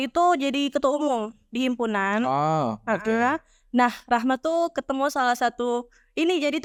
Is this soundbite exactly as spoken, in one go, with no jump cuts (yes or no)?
yes